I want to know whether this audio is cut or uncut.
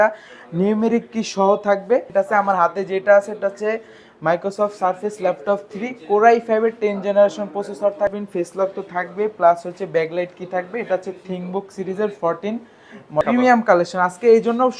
cut